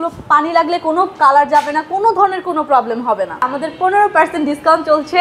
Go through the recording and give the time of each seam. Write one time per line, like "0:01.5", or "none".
0:03.5